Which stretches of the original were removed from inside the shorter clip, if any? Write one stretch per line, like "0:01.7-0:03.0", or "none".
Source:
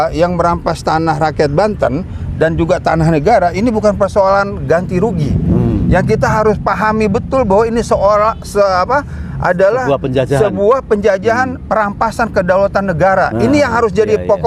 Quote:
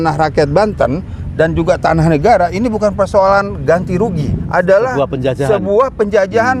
0:05.4-0:09.2